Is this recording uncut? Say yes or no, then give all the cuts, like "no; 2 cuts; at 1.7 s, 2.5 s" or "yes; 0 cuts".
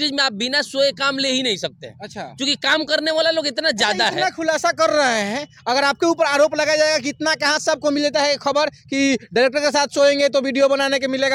yes; 0 cuts